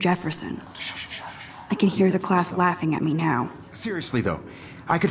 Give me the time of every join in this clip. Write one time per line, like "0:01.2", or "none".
0:03.7